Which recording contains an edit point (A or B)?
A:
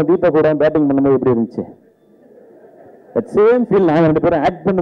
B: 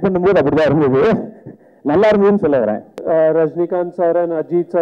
B